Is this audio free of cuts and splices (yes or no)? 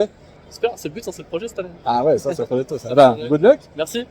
yes